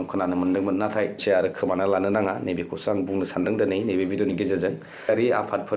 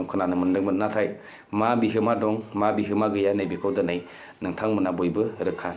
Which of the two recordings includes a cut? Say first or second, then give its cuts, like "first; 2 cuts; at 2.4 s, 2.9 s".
first; 2 cuts; at 1.2 s, 5.1 s